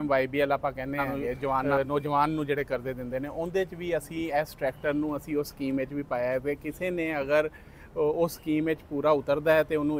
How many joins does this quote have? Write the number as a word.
one